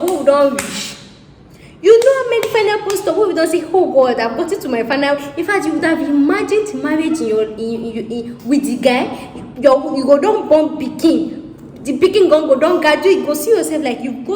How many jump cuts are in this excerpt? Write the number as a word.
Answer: zero